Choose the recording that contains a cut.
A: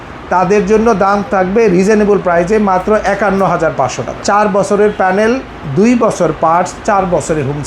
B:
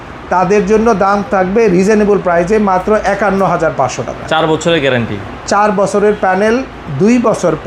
A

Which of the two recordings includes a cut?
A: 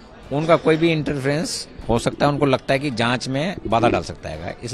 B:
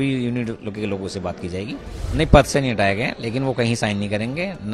B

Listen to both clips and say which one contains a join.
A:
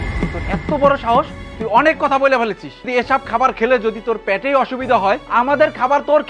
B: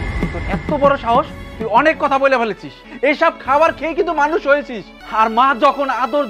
B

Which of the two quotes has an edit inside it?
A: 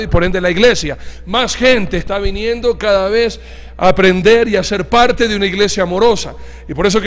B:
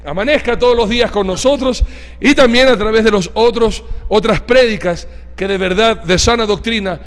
A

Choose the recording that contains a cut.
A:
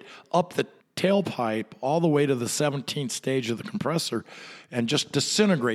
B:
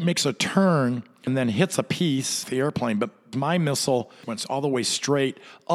B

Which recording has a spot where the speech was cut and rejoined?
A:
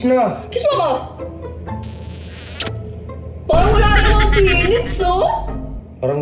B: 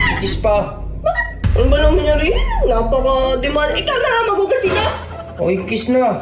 B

